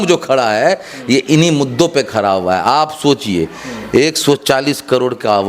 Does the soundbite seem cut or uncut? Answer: uncut